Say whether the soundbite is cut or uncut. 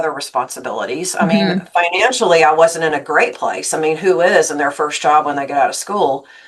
uncut